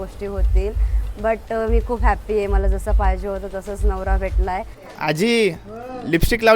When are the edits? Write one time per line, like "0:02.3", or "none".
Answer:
0:04.8